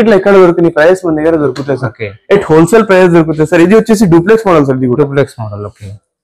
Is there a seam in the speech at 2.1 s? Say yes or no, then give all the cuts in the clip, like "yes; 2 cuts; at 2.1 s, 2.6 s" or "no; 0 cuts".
no; 0 cuts